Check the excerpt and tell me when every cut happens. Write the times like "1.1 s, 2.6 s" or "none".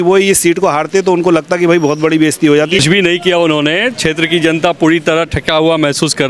2.8 s